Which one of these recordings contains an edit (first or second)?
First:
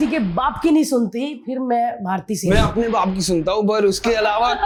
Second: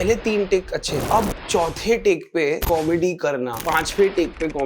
second